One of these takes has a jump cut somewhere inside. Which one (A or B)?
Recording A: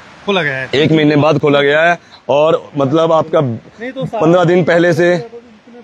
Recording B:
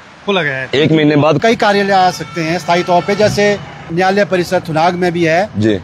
B